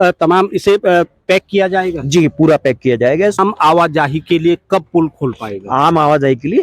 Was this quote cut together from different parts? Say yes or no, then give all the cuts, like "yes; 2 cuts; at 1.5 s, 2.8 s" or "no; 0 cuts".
yes; 1 cut; at 3.4 s